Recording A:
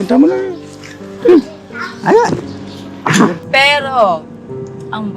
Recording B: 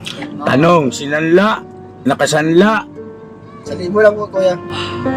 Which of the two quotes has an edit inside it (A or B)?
A